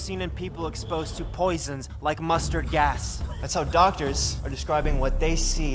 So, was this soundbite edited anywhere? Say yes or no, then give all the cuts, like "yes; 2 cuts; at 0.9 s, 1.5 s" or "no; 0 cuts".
no; 0 cuts